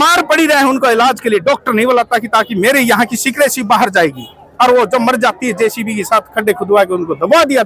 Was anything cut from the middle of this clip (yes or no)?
no